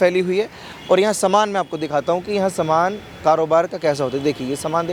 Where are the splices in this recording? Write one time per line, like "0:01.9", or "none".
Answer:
none